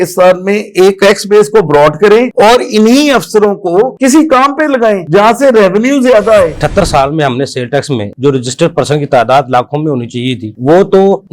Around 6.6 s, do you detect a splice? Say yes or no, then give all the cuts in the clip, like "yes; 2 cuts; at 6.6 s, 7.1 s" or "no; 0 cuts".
yes; 2 cuts; at 1.0 s, 6.6 s